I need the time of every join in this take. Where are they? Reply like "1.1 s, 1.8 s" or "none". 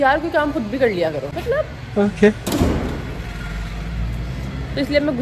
none

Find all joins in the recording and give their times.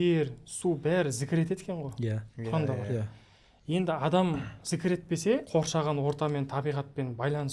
5.5 s

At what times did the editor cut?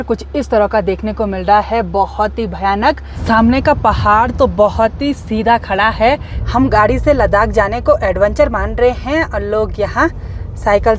3.1 s, 6.3 s

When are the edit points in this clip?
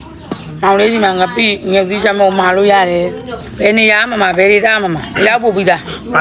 3.4 s, 5.1 s

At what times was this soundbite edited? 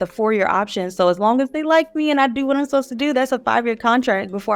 none

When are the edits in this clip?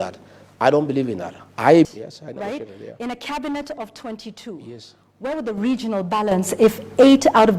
1.9 s

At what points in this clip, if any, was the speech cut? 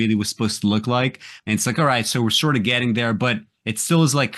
1.3 s

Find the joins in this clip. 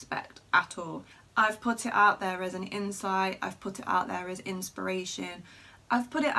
1.2 s

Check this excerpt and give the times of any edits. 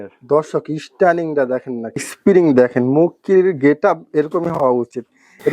2.1 s

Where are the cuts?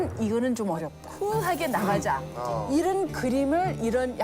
1.0 s

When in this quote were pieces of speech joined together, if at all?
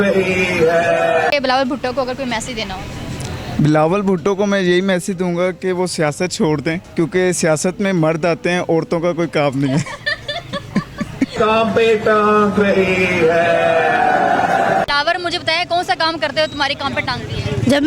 none

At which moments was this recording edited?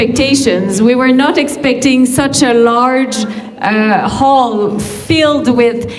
none

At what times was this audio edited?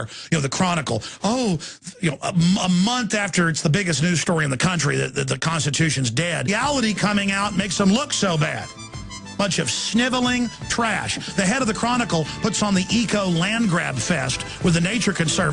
none

